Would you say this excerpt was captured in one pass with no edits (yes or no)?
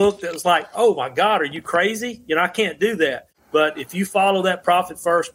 no